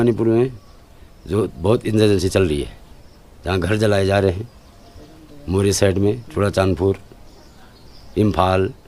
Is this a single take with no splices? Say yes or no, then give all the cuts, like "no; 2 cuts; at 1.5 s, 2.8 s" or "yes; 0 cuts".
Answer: yes; 0 cuts